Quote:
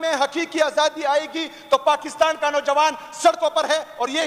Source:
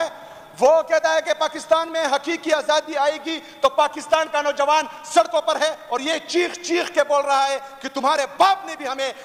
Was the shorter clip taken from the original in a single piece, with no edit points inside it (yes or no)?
yes